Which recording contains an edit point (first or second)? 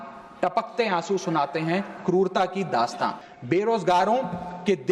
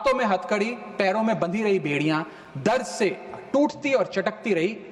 first